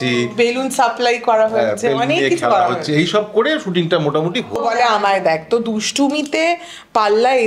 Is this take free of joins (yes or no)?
no